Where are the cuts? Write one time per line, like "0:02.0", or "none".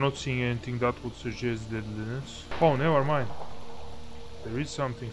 0:02.5